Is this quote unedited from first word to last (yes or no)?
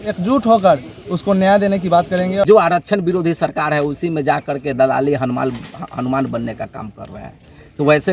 no